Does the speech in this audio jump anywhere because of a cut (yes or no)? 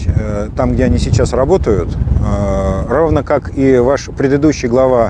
no